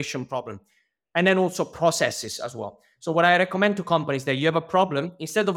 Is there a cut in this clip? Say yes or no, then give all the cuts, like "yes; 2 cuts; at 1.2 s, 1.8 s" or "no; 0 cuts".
no; 0 cuts